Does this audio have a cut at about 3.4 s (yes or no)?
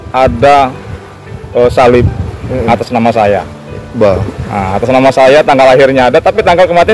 no